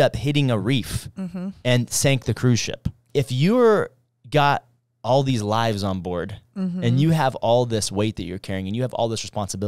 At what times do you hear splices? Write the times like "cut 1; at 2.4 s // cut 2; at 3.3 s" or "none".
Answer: cut 1; at 3.0 s